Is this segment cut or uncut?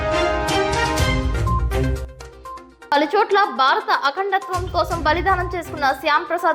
cut